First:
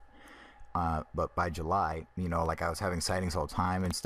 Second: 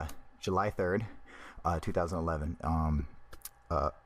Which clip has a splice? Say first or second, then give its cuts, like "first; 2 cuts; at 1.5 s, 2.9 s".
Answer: first; 1 cut; at 2.9 s